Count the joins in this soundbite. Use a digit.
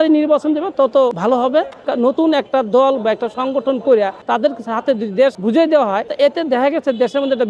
4